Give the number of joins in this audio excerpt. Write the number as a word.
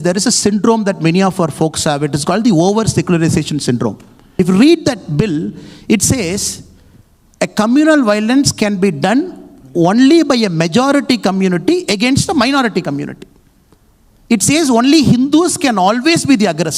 one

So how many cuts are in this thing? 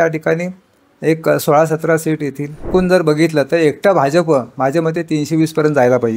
one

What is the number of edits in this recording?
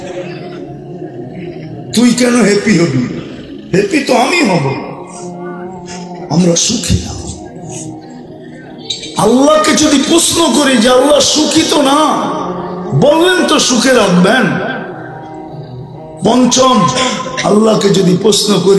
one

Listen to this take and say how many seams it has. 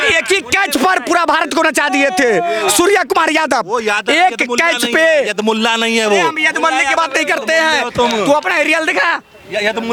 zero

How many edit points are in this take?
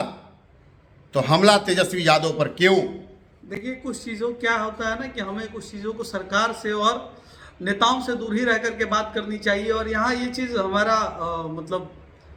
zero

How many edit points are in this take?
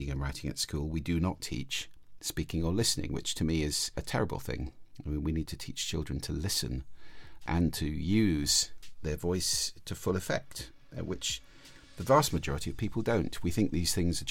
two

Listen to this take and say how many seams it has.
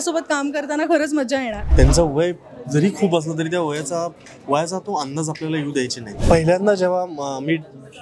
two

